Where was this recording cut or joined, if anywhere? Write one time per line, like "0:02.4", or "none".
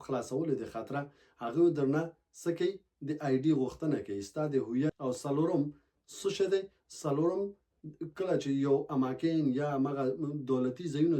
0:05.0